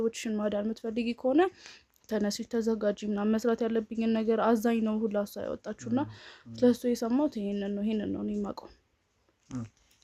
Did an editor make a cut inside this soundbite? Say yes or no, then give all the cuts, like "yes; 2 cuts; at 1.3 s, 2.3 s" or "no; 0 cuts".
no; 0 cuts